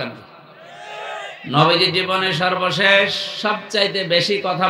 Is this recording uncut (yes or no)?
yes